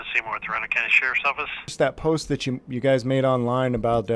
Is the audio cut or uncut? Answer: cut